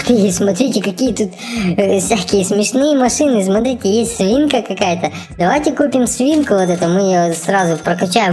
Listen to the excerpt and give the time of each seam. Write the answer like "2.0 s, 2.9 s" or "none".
none

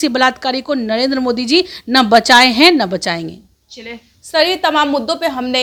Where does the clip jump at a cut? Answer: none

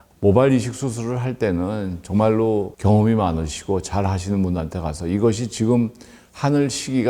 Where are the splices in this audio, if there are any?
2.7 s

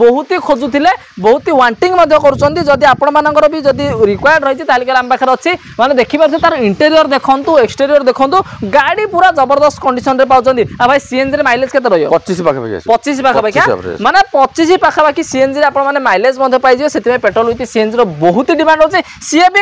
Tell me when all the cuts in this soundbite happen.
none

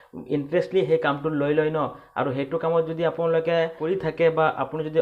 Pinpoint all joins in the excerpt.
3.9 s

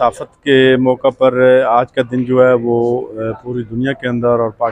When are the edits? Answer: none

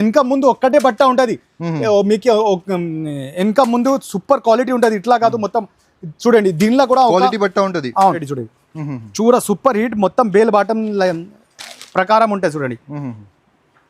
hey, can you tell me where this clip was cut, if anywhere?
8.3 s

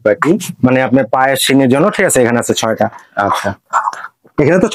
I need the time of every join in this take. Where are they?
none

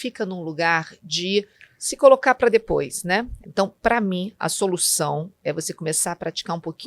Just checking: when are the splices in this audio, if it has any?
3.4 s

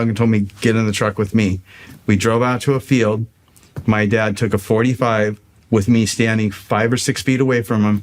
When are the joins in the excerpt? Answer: 5.5 s, 6.6 s

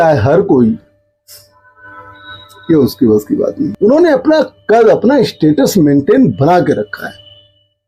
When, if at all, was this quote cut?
3.7 s

